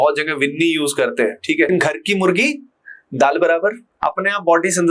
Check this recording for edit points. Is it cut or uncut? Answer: cut